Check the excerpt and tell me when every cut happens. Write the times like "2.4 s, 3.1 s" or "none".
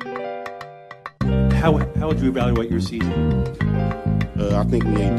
1.1 s